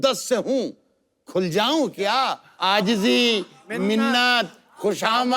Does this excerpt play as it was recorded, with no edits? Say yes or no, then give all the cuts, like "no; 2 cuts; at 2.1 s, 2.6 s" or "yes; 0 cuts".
no; 1 cut; at 2.5 s